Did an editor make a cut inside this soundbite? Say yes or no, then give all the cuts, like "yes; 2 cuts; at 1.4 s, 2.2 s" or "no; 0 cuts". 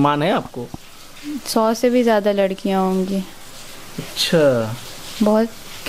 no; 0 cuts